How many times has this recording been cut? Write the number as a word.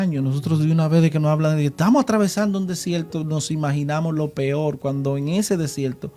zero